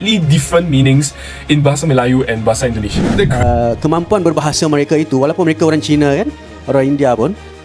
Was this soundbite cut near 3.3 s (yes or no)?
yes